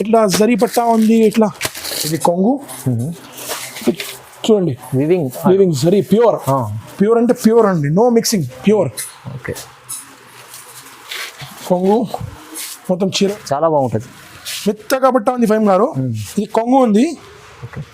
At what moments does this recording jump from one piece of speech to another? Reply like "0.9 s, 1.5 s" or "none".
2.1 s, 13.3 s